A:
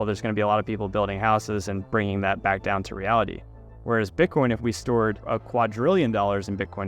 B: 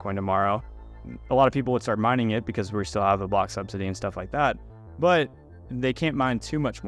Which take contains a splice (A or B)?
A